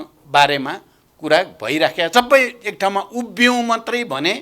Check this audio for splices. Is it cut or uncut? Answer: cut